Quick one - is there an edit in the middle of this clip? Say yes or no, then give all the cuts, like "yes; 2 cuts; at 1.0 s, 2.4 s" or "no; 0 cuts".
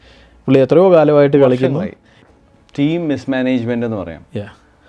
yes; 1 cut; at 2.2 s